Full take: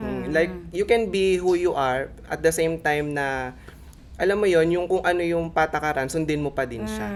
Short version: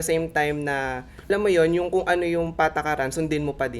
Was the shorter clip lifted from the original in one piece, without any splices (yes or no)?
no